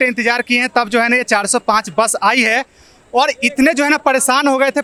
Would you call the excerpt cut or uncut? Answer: uncut